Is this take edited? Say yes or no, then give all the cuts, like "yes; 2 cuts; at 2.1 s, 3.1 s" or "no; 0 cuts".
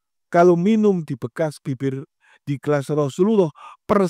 no; 0 cuts